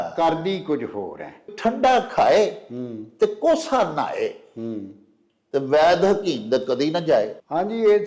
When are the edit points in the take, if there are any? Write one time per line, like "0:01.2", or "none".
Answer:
0:01.5